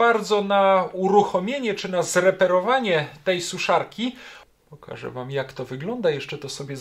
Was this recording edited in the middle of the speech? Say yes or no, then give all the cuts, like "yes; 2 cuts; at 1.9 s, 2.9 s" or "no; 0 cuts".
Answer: yes; 1 cut; at 4.3 s